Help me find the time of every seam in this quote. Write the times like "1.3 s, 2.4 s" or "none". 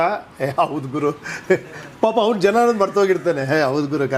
none